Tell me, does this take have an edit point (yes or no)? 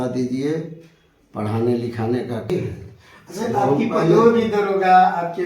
yes